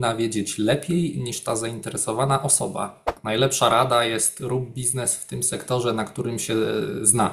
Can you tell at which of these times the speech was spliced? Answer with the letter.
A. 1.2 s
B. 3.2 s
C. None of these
B